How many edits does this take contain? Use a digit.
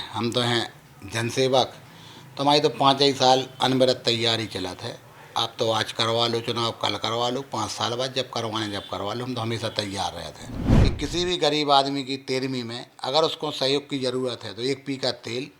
1